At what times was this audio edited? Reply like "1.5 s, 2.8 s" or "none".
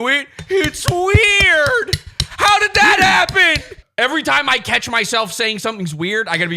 3.9 s